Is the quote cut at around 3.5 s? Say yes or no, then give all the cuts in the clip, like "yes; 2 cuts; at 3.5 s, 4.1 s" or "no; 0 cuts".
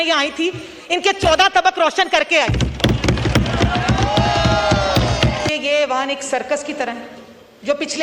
no; 1 cut; at 5.5 s